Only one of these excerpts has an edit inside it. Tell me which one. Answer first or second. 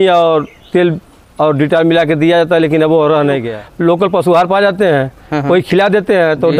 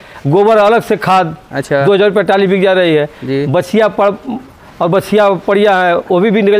first